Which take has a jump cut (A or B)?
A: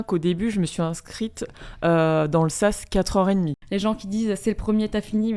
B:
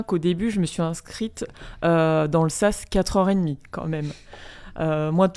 A